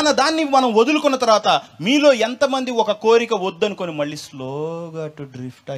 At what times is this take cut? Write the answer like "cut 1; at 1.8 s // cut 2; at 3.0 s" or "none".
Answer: none